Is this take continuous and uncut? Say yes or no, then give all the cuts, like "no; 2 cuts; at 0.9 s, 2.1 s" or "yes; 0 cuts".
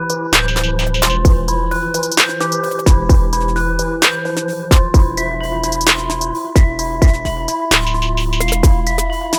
yes; 0 cuts